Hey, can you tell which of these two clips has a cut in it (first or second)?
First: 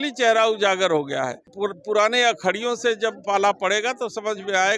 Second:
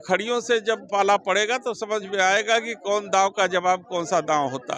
first